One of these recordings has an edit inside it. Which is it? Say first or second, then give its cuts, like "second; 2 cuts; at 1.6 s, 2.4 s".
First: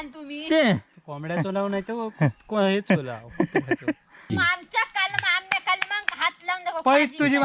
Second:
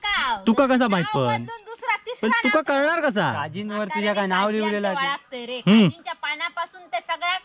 first; 1 cut; at 4.3 s